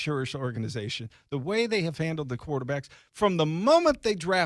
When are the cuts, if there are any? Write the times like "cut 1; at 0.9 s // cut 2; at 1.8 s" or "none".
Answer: none